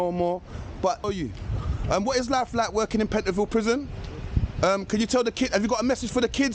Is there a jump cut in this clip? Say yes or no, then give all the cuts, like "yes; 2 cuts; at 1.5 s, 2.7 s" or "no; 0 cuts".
yes; 1 cut; at 1.0 s